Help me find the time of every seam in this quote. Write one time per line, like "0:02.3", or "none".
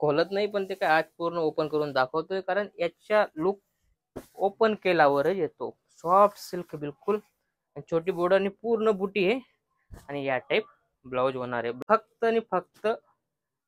0:11.8